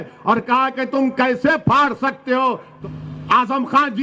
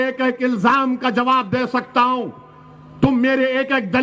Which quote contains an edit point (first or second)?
first